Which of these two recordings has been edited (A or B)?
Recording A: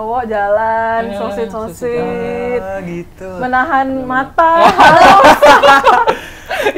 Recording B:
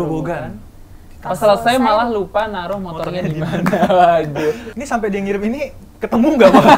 B